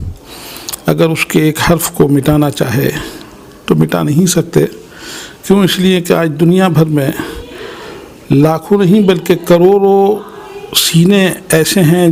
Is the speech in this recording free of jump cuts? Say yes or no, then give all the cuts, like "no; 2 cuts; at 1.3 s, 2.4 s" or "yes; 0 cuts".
yes; 0 cuts